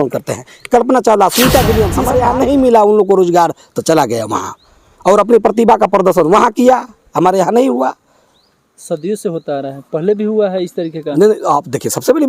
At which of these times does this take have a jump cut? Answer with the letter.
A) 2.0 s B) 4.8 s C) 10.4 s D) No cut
A